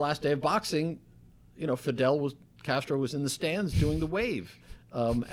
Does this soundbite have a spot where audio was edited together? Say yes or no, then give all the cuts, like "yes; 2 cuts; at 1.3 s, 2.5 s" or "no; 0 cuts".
no; 0 cuts